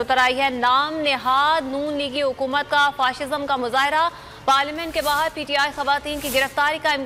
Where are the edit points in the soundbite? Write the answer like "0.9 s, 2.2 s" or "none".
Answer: none

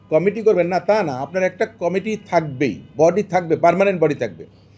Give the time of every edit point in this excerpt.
none

